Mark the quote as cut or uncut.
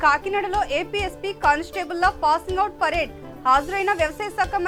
uncut